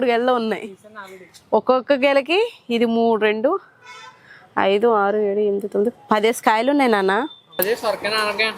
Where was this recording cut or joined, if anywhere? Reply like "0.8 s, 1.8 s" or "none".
7.6 s